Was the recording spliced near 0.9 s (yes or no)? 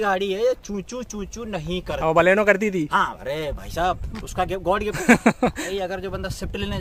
no